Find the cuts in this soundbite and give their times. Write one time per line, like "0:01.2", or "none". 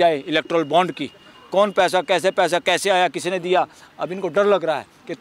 0:03.8